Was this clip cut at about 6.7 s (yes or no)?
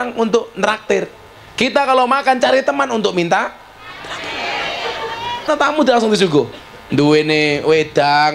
no